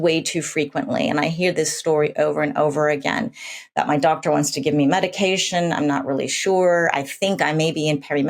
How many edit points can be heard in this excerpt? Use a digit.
0